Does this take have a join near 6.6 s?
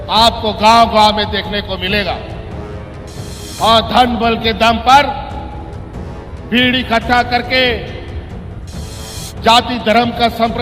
no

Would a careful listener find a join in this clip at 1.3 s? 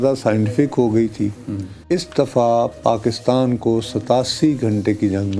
no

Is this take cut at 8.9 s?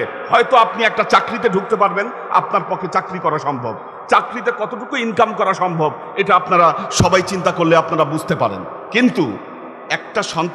no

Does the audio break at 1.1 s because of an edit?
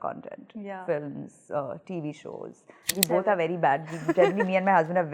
no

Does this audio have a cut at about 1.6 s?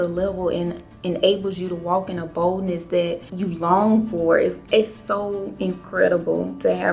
no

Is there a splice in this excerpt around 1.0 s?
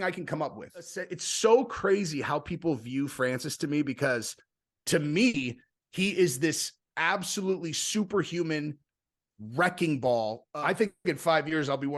yes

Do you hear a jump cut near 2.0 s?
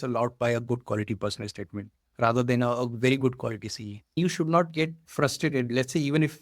no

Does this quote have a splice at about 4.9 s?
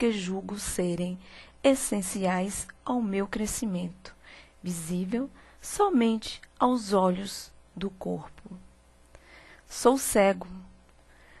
yes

